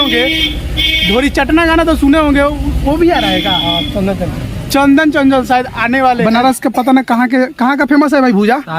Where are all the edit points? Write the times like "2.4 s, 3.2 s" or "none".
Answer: 6.2 s

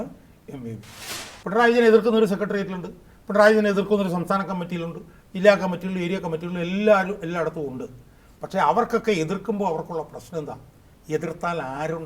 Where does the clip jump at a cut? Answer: 1.1 s

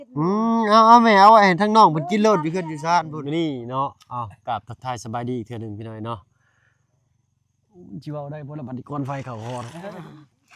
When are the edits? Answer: 3.2 s

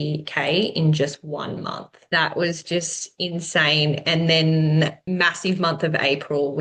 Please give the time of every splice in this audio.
2.0 s, 5.0 s

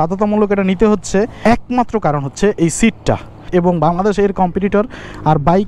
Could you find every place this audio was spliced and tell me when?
1.3 s, 3.3 s

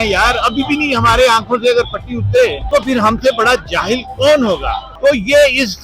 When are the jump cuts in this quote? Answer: 2.6 s, 4.9 s

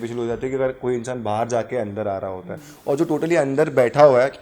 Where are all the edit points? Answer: none

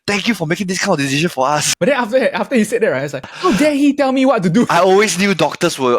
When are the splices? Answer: 1.7 s, 3.3 s, 4.7 s

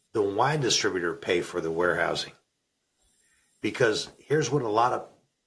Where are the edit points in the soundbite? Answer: none

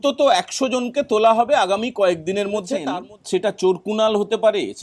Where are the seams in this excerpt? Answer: 2.9 s

